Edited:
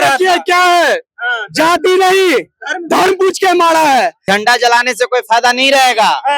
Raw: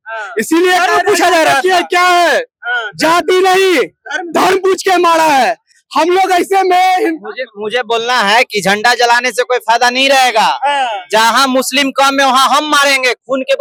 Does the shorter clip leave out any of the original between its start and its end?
yes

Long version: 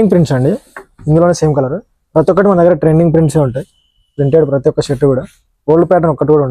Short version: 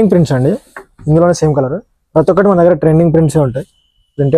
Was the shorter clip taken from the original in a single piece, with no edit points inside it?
yes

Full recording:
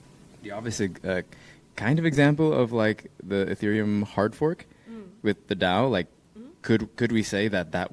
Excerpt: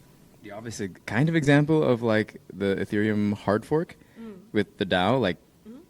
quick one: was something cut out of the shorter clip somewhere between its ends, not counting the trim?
yes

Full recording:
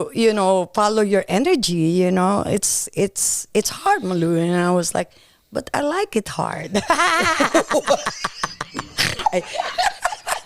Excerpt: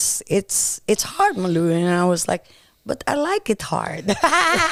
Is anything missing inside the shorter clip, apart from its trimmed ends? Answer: no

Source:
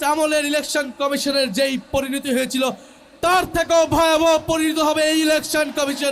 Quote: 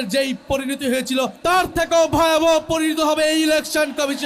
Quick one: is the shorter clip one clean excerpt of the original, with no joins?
no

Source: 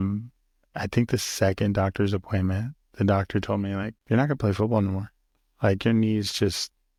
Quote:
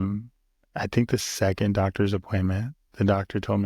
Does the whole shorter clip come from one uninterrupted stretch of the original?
yes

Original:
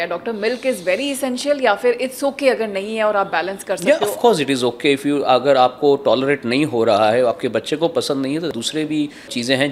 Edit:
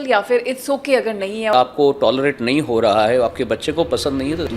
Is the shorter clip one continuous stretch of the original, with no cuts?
no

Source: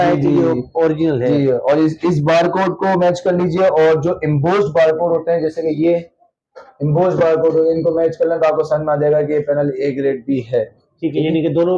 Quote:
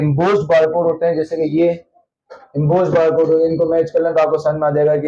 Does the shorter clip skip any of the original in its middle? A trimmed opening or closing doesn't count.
no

